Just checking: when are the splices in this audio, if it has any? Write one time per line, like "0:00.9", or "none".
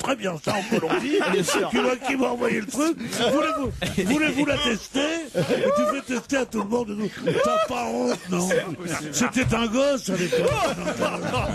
0:09.9